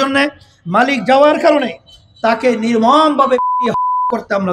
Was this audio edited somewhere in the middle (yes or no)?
no